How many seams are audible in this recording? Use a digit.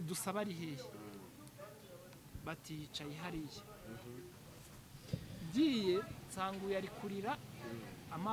0